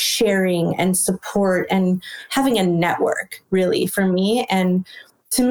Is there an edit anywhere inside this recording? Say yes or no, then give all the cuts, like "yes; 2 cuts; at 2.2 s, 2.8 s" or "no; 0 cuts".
yes; 1 cut; at 2.2 s